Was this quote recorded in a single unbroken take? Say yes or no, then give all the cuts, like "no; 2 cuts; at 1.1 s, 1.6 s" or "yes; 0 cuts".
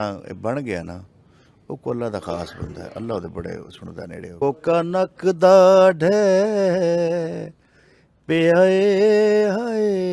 no; 1 cut; at 4.4 s